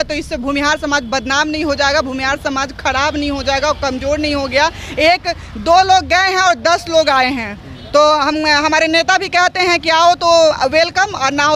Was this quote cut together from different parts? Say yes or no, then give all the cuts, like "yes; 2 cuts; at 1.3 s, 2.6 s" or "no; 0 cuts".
no; 0 cuts